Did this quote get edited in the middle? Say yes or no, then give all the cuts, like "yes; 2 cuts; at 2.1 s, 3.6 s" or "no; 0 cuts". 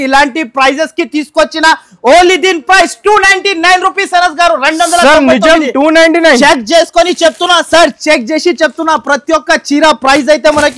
no; 0 cuts